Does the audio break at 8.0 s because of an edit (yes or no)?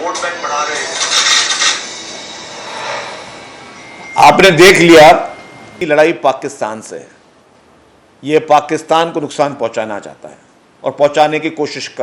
no